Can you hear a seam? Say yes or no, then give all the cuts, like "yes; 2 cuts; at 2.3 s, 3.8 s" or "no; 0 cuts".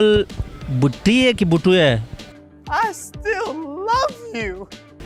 no; 0 cuts